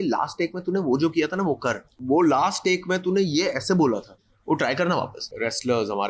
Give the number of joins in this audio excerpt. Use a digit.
2